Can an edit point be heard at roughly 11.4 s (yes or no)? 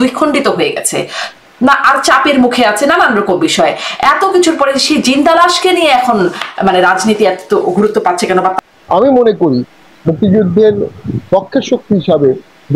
no